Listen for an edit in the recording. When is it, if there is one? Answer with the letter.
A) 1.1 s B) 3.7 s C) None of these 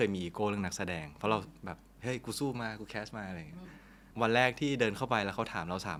C